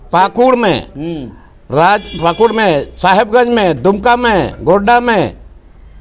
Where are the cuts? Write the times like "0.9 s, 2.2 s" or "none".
none